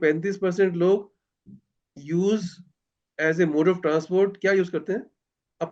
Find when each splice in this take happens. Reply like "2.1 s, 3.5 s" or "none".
none